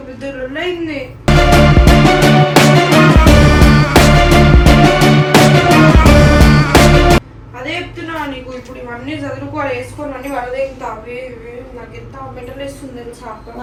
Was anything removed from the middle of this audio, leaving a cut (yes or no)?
no